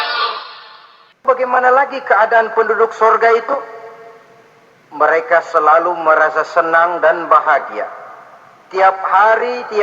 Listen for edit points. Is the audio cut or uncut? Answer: cut